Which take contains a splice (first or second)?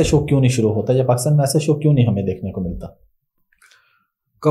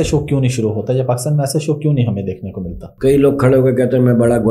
second